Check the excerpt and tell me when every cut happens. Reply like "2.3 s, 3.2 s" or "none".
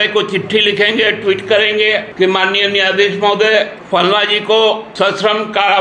2.1 s, 3.8 s, 4.9 s